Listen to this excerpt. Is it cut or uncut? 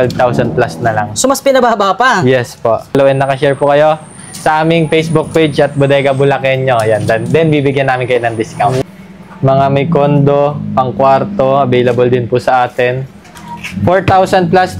cut